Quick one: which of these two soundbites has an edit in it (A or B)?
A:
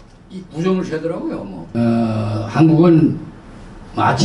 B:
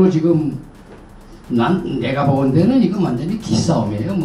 A